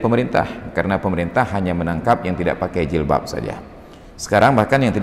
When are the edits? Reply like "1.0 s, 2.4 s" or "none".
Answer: none